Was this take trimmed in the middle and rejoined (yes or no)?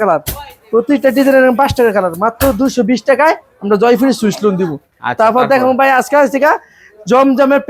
no